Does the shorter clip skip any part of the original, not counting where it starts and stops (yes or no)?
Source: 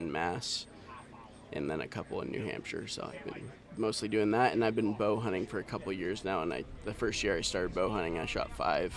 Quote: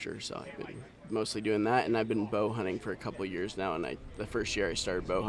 no